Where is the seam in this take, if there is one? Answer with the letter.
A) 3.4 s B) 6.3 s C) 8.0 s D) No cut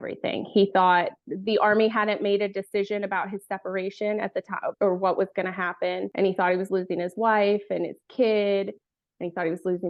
D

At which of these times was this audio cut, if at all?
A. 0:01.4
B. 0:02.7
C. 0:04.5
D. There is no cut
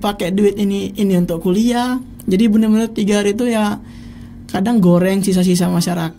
D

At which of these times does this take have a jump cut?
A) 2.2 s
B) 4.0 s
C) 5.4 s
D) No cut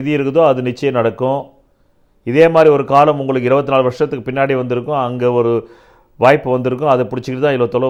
D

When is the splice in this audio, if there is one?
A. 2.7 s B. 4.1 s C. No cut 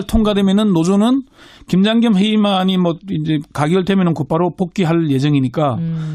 A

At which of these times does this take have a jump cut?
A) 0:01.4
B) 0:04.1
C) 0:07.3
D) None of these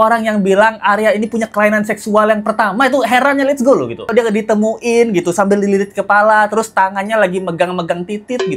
B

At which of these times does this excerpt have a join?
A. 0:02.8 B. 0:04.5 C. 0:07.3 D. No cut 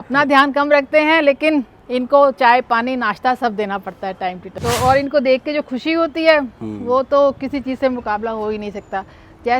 B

